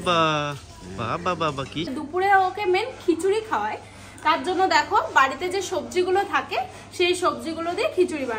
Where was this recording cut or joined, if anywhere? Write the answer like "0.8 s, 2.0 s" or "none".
1.9 s